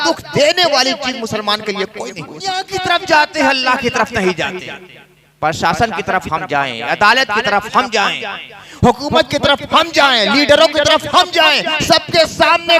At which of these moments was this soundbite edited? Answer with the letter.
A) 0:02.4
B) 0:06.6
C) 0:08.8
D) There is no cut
A